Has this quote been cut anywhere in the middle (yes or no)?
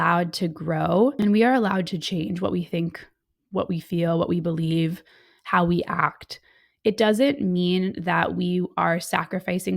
yes